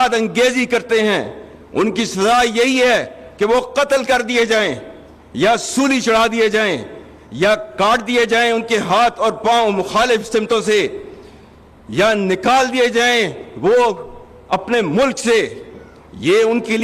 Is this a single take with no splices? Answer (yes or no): yes